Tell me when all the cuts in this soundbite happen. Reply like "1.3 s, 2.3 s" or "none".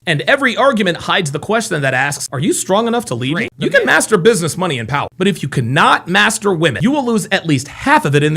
3.5 s